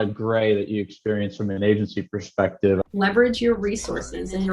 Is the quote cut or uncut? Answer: cut